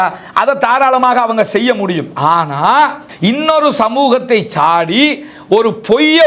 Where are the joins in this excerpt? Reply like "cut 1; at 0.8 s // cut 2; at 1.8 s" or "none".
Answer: none